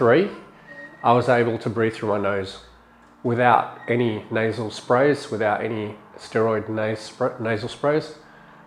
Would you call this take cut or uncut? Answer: uncut